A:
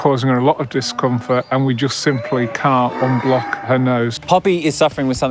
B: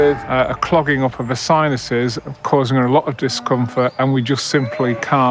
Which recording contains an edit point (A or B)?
A